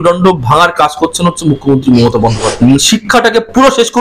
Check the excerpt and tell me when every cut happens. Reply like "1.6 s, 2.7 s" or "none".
2.4 s